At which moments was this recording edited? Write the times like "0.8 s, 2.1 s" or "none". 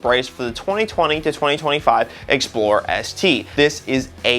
3.5 s